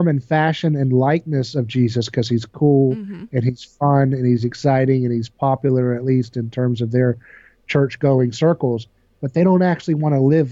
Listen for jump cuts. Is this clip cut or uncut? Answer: uncut